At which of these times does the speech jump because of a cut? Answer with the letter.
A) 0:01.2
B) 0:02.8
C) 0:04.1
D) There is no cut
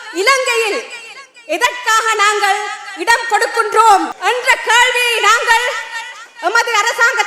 C